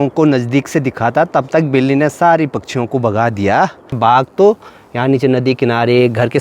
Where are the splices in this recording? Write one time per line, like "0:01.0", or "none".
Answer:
0:04.0